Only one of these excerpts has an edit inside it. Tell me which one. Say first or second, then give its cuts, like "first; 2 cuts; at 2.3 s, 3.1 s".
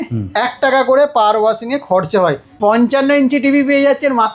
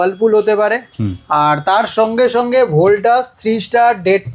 first; 1 cut; at 2.5 s